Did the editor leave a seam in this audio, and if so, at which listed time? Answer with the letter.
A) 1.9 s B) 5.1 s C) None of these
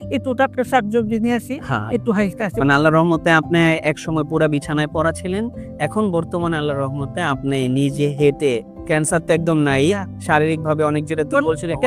C